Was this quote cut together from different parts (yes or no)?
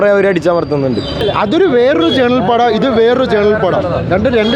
yes